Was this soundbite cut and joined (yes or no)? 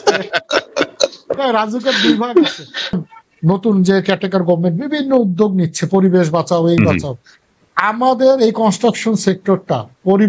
yes